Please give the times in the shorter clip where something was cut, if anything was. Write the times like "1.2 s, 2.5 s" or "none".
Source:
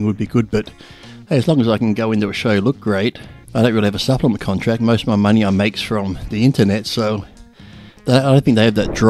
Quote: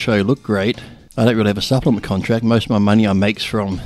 none